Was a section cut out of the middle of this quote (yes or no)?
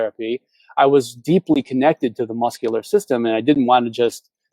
no